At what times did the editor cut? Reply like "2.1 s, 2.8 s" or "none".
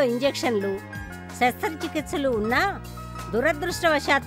none